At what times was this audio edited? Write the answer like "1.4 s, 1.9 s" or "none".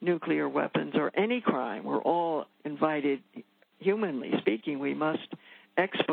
2.6 s